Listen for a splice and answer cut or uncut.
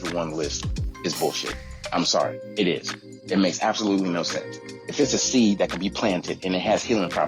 uncut